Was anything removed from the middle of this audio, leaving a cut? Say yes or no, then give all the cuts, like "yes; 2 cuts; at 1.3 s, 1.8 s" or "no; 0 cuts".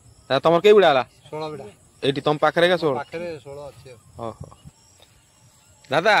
no; 0 cuts